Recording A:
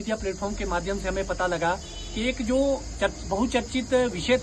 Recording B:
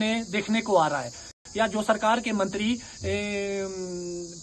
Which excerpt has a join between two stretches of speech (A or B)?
B